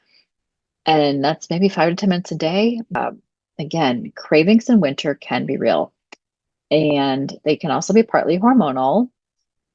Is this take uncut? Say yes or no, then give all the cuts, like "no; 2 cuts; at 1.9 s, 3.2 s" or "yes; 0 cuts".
no; 1 cut; at 3.0 s